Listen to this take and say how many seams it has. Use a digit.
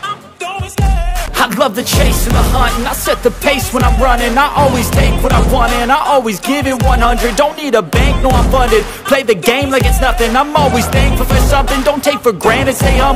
1